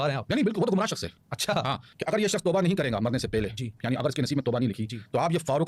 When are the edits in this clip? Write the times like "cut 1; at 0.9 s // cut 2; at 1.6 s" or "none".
cut 1; at 1.9 s